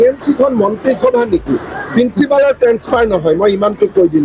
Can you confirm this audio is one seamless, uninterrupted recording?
yes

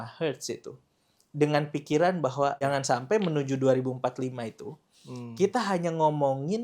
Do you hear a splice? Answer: yes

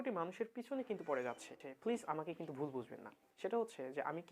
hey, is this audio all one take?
no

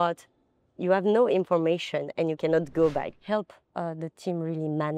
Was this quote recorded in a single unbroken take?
no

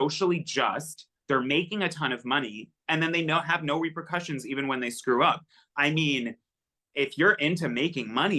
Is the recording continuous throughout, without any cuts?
yes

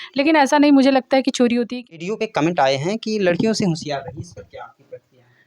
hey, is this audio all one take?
no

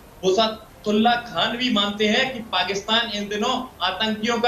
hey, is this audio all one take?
yes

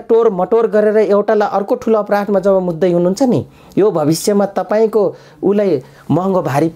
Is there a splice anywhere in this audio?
no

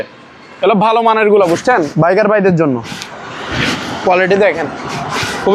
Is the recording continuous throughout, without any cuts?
yes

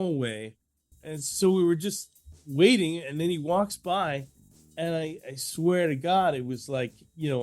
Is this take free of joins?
no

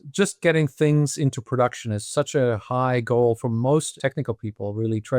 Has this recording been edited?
yes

